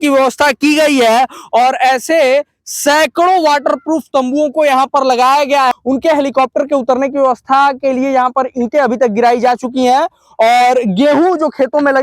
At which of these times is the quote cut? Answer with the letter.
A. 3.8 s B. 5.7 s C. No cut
B